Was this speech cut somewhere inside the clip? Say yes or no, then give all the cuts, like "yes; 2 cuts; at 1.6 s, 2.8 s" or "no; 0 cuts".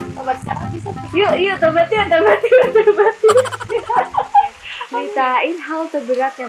yes; 1 cut; at 4.8 s